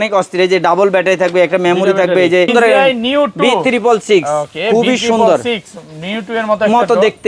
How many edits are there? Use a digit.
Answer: 1